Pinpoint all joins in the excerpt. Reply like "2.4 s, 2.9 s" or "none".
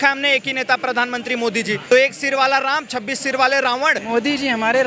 1.8 s, 4.0 s